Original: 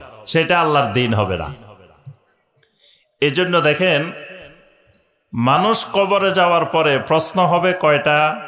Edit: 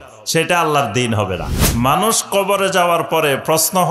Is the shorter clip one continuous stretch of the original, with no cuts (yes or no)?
no